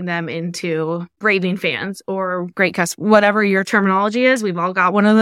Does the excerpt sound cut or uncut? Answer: cut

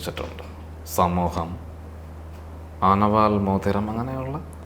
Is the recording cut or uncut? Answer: uncut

